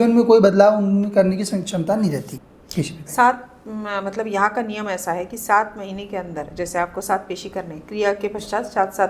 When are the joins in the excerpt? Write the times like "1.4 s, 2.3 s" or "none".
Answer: 2.3 s